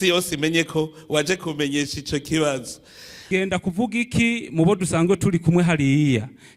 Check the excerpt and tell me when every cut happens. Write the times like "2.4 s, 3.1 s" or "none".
3.3 s